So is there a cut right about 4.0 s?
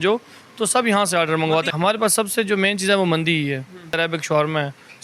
yes; 2 cuts; at 1.7 s, 4.0 s

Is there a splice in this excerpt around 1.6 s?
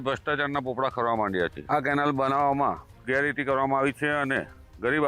yes; 1 cut; at 1.6 s

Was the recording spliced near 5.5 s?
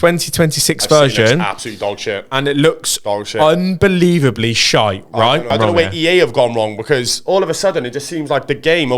yes; 1 cut; at 5.5 s

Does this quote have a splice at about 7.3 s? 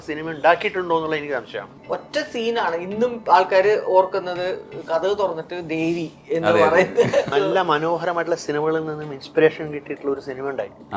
yes; 2 cuts; at 1.7 s, 7.3 s

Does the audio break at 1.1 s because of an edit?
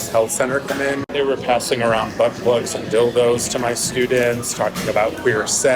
yes; 1 cut; at 1.1 s

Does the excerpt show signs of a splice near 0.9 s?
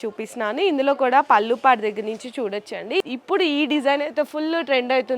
no; 1 cut; at 3.0 s

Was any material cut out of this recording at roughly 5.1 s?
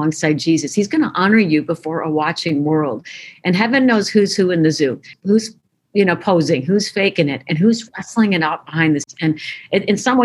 yes; 2 cuts; at 5.1 s, 9.1 s

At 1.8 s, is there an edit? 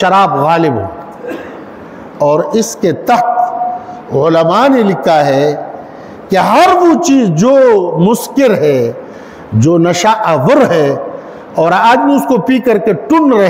no; 0 cuts

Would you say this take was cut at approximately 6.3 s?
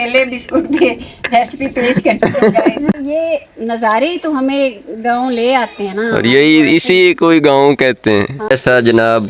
no; 2 cuts; at 3.0 s, 8.3 s

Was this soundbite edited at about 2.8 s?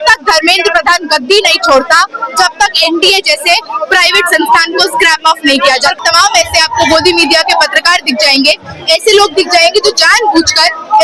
no; 1 cut; at 6.0 s

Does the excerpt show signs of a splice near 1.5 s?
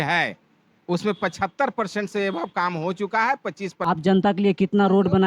no; 1 cut; at 3.7 s

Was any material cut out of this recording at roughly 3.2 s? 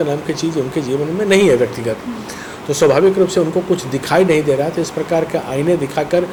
no; 0 cuts

